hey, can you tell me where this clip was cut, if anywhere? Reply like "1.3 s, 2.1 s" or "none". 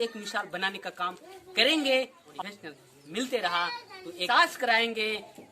2.2 s, 4.2 s